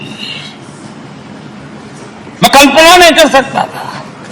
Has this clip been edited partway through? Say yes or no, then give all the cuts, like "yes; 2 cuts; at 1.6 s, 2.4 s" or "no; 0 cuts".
yes; 1 cut; at 2.5 s